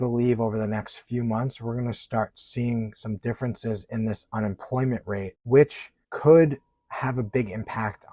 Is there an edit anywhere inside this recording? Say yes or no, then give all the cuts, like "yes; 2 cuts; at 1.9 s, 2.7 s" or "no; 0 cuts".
no; 0 cuts